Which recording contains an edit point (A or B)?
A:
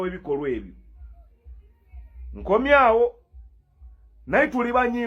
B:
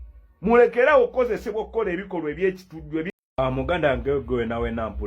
B